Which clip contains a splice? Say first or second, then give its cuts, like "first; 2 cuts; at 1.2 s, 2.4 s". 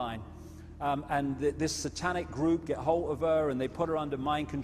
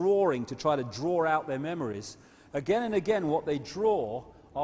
second; 1 cut; at 1.5 s